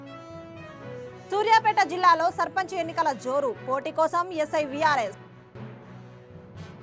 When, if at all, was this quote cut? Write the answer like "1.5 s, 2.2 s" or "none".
none